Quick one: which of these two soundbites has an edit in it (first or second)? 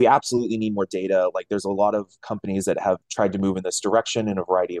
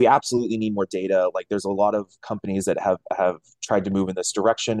first